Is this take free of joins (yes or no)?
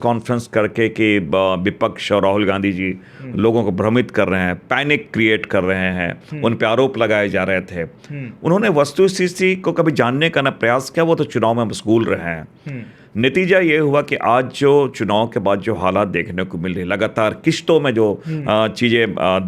yes